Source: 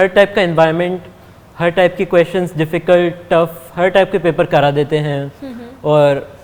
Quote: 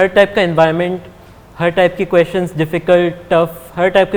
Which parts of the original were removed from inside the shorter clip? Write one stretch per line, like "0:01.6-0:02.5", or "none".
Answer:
none